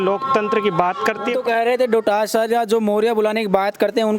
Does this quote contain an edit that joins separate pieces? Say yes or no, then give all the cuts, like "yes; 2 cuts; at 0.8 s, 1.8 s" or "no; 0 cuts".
yes; 1 cut; at 1.4 s